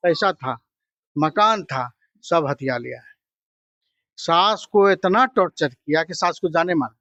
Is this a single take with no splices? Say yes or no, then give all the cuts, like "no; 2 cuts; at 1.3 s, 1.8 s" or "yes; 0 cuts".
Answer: yes; 0 cuts